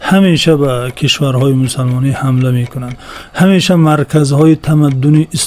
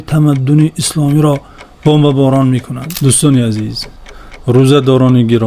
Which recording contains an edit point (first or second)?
second